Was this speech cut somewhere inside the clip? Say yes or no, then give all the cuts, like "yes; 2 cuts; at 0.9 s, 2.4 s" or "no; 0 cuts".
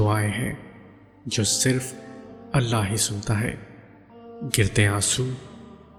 no; 0 cuts